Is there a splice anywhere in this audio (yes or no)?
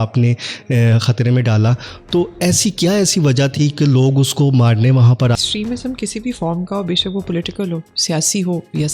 yes